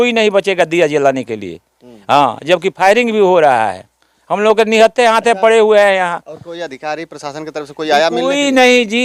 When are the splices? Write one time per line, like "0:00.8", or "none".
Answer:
none